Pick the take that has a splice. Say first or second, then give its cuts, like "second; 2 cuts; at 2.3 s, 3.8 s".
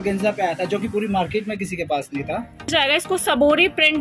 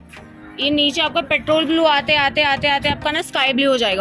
first; 1 cut; at 2.7 s